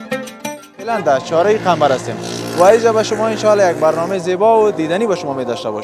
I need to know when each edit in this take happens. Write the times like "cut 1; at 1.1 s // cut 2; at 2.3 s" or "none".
cut 1; at 1.0 s